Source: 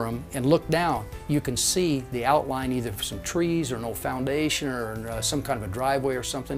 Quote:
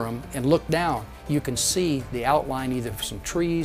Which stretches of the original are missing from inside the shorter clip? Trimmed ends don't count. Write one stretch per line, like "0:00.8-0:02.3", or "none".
none

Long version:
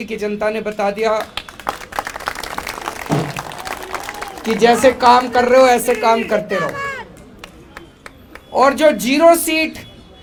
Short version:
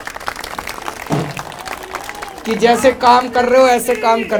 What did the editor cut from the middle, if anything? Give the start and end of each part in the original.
none

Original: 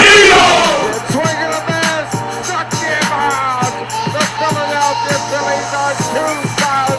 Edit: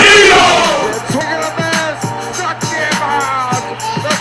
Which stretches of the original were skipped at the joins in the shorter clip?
0:01.2-0:01.3

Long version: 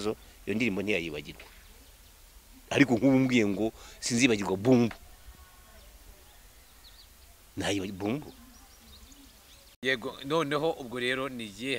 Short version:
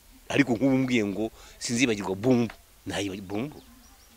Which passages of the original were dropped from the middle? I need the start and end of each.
0:05.1-0:07.4

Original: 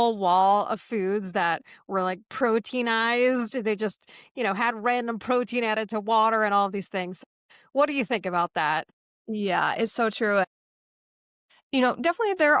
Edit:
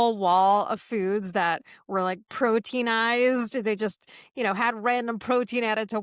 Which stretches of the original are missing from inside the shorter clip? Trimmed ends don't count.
none

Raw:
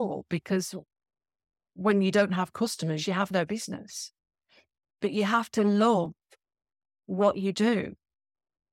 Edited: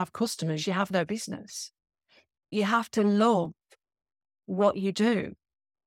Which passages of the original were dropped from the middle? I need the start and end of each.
0:04.9-0:05.1

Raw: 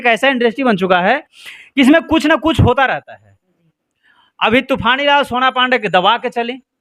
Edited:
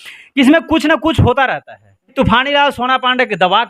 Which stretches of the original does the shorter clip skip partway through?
0:03.5-0:04.7

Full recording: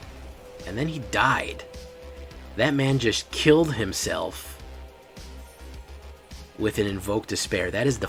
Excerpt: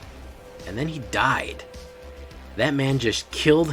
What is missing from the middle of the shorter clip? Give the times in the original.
none

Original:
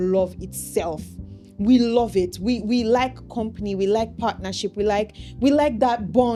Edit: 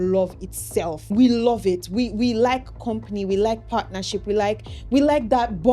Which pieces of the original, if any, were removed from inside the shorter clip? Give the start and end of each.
0:01.0-0:01.5

